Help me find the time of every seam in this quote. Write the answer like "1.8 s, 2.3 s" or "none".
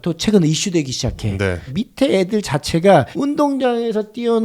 1.7 s, 3.1 s

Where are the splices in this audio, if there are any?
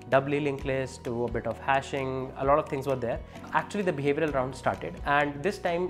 3.5 s

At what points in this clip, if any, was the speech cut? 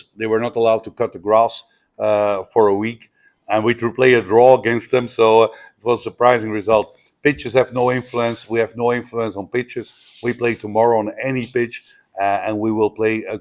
none

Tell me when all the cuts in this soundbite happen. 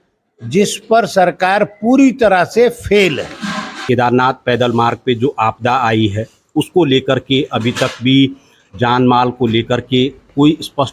3.7 s

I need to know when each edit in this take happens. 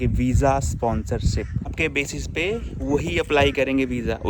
1.7 s

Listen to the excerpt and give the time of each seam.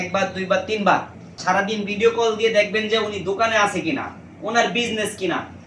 1.4 s

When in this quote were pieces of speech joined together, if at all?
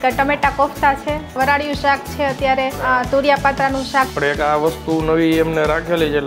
1.4 s, 2.8 s, 4.1 s

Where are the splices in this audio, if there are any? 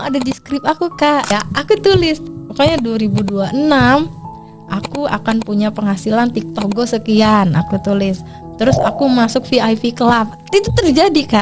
1.3 s

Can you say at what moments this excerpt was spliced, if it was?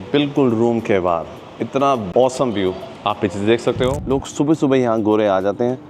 2.1 s, 4.0 s

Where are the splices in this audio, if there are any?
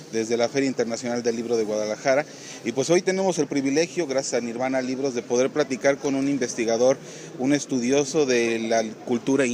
7.9 s

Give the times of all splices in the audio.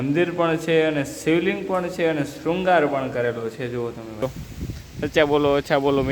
4.2 s

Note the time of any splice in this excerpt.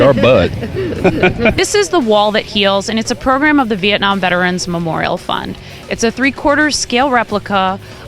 1.6 s

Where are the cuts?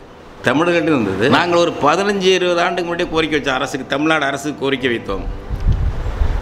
1.3 s

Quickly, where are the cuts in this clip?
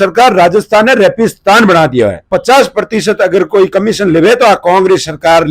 2.3 s

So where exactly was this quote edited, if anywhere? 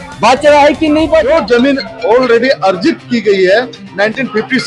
1.3 s

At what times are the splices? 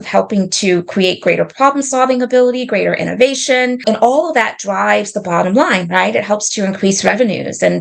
3.8 s

